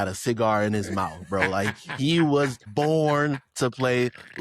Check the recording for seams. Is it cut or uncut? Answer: cut